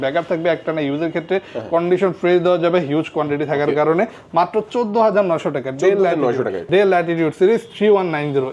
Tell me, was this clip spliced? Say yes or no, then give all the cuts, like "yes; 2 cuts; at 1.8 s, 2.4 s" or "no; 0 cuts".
yes; 2 cuts; at 4.2 s, 6.6 s